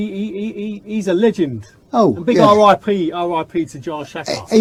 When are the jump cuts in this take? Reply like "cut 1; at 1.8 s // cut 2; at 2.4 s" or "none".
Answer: none